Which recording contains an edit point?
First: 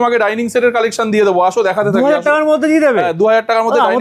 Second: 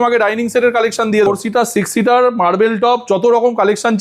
second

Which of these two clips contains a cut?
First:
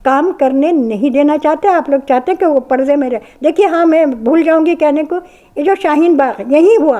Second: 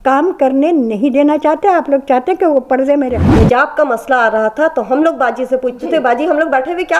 second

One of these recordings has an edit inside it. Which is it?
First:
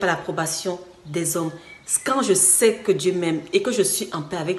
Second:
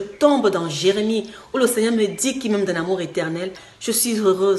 second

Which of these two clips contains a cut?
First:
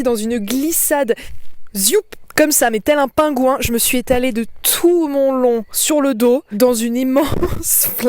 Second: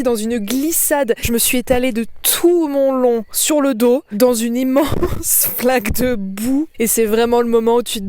second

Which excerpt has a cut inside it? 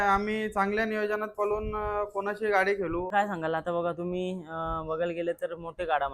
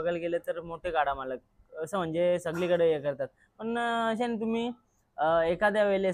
first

